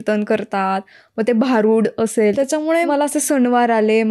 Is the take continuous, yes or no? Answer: no